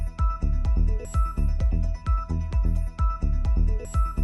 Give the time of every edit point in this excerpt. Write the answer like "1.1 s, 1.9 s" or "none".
none